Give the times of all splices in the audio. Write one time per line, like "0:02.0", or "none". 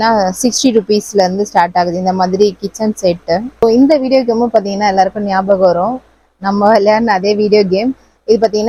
none